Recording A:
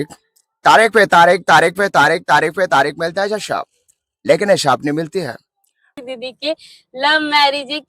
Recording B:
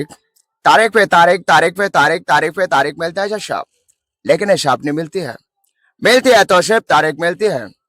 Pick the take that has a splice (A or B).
A